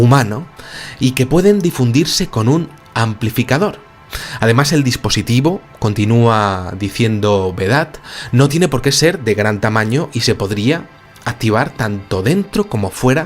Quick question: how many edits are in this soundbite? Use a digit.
1